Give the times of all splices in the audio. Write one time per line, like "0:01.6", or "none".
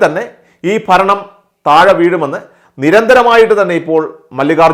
none

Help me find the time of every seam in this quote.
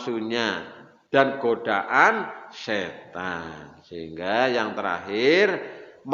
none

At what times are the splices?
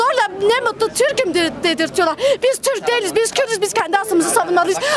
none

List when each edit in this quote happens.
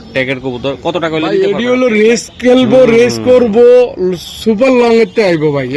0:01.3

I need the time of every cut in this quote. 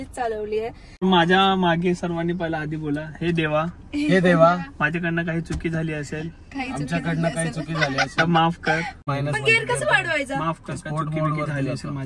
0:01.0
0:09.0

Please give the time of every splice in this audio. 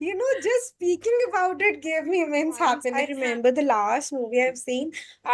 0:03.0

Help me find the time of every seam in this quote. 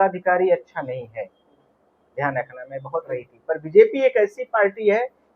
0:03.2

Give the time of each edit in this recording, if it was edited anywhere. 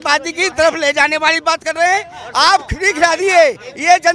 none

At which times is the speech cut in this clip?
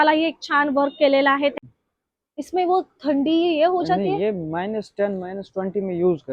0:01.5

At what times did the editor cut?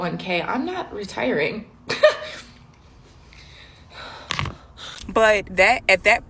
0:05.0

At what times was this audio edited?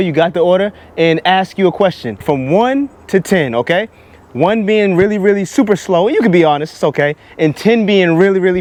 none

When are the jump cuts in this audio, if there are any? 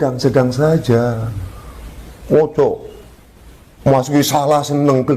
none

